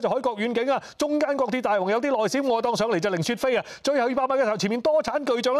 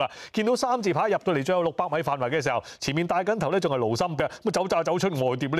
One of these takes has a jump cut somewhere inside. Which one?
second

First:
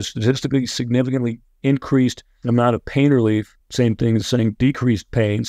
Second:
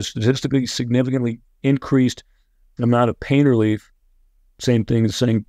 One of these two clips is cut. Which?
first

